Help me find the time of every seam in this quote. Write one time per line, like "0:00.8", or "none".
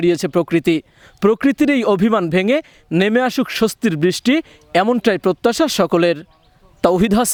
none